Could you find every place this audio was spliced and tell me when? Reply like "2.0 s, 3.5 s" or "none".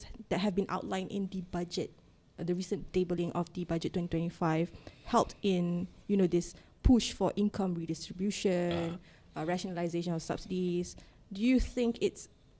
none